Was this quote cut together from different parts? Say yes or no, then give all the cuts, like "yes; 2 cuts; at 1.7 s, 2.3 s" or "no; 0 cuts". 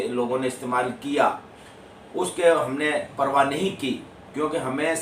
no; 0 cuts